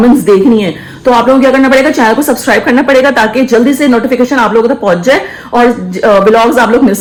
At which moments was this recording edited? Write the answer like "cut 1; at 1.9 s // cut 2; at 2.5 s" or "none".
none